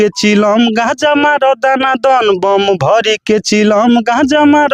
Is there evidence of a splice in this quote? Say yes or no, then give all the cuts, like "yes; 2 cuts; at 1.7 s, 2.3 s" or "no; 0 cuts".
no; 0 cuts